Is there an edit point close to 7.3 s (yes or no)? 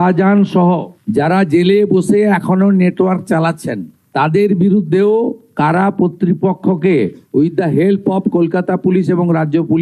no